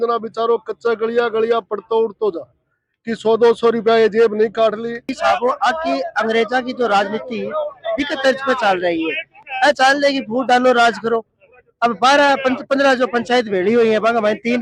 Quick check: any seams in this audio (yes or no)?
yes